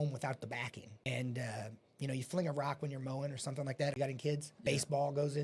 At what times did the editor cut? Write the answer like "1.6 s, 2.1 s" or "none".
1.1 s, 4.2 s

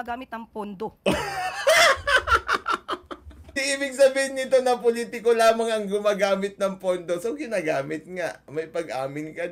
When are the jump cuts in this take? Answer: 3.5 s

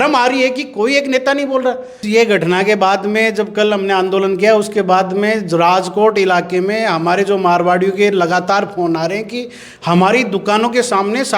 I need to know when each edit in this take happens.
2.0 s

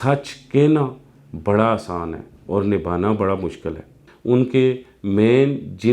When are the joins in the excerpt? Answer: 4.1 s

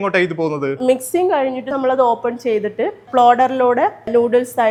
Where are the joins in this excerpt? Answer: none

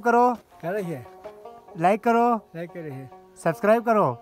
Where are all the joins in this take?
none

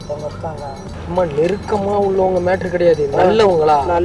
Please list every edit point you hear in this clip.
0.9 s

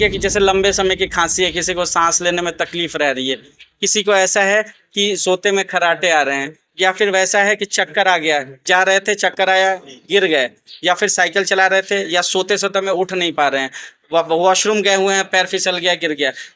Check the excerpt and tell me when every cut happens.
none

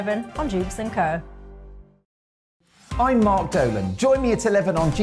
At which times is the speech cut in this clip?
2.6 s

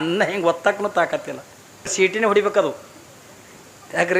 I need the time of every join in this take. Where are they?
1.9 s

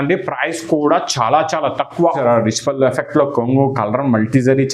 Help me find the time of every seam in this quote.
2.1 s

